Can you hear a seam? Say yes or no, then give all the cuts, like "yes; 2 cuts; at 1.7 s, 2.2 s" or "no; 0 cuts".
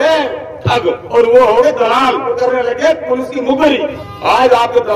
yes; 3 cuts; at 1.0 s, 2.3 s, 4.0 s